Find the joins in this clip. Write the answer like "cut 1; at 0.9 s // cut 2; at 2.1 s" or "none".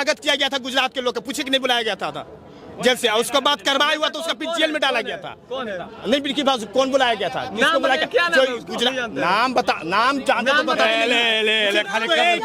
none